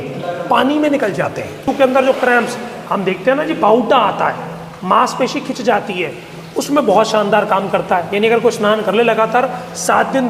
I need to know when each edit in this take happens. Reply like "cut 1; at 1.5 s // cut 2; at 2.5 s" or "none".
cut 1; at 1.6 s